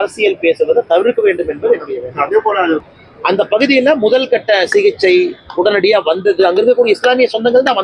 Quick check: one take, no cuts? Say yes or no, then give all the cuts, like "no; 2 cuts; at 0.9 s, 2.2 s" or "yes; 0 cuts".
no; 1 cut; at 2.8 s